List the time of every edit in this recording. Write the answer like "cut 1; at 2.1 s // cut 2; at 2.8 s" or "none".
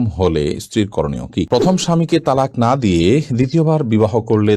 cut 1; at 1.5 s